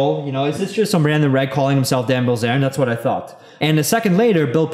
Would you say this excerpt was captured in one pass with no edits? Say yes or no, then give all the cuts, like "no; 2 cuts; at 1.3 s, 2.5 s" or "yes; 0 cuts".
no; 1 cut; at 3.4 s